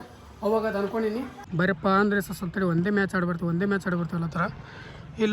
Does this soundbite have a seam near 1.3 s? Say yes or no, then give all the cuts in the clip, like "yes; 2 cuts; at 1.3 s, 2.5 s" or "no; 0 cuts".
yes; 1 cut; at 1.3 s